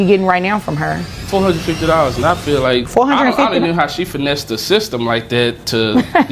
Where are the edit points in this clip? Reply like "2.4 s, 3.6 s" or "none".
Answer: 1.1 s, 2.9 s